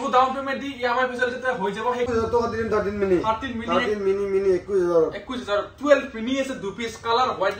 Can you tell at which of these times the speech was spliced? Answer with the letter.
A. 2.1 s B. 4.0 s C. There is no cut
A